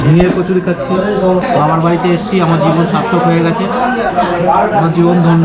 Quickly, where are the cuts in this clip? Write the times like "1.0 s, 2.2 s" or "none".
1.4 s, 4.1 s